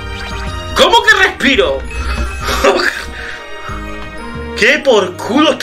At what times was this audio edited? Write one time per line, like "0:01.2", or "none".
none